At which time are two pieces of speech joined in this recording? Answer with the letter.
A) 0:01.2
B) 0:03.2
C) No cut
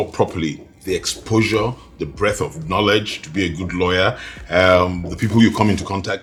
C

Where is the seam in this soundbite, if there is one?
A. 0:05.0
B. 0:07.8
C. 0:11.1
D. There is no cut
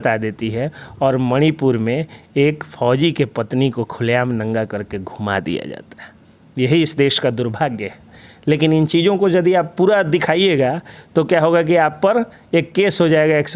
D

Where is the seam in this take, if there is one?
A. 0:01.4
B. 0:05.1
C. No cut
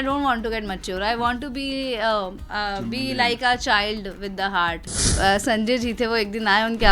B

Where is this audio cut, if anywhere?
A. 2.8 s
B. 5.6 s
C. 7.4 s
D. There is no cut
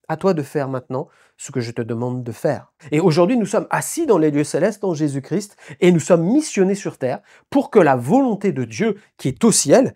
A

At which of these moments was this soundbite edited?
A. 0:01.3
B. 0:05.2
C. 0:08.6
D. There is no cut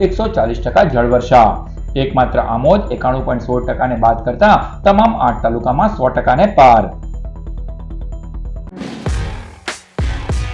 C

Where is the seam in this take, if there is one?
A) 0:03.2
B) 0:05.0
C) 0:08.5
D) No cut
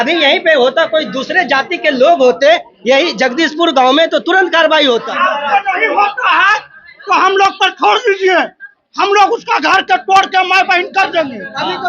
B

